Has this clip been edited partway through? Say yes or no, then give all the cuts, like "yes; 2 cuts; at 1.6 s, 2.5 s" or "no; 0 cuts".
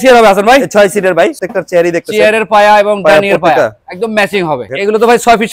yes; 2 cuts; at 1.4 s, 4.6 s